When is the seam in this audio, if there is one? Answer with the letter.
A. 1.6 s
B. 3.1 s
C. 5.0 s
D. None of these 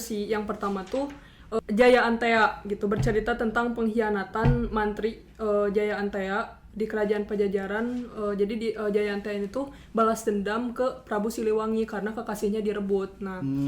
A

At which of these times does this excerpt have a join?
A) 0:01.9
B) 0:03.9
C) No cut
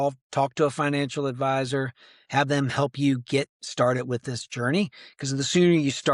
C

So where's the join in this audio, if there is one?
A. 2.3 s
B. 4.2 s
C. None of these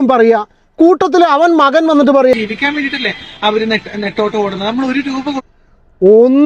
A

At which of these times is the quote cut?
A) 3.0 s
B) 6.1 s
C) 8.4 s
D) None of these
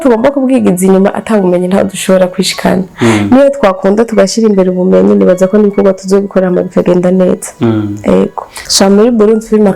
C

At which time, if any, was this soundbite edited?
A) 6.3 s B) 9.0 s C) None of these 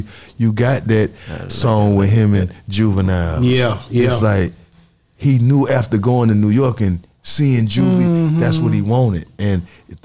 C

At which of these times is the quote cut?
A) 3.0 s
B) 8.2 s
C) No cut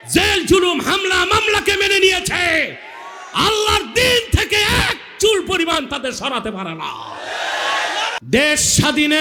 B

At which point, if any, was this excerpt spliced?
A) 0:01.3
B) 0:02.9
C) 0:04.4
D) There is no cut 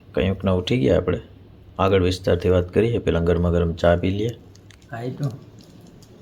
C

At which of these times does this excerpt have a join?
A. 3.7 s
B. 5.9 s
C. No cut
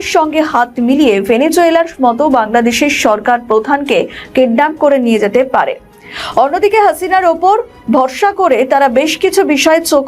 C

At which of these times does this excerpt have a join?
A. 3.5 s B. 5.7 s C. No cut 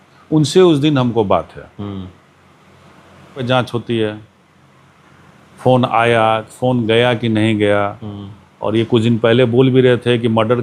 A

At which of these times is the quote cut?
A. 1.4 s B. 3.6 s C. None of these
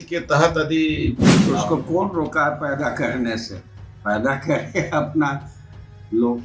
A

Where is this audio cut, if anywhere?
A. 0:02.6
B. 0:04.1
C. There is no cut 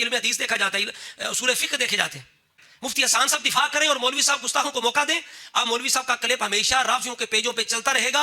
A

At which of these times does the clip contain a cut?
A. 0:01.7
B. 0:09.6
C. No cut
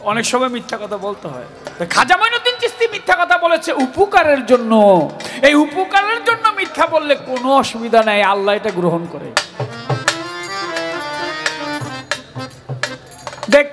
C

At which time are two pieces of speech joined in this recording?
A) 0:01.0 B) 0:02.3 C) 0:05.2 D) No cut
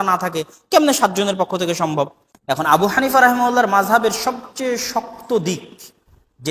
B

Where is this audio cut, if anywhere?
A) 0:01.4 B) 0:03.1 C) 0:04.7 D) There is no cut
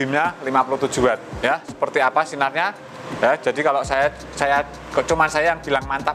D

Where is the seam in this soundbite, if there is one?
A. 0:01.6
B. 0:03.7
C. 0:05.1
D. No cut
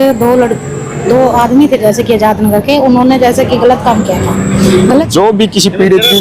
C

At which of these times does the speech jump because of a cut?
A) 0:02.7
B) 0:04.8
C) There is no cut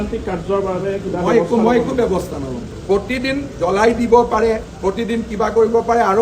A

